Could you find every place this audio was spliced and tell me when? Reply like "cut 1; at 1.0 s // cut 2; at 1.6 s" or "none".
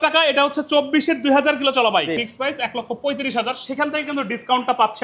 cut 1; at 2.2 s